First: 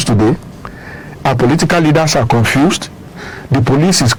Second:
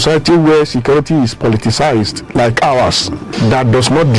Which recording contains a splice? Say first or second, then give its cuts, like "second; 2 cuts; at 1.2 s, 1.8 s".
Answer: second; 1 cut; at 3.2 s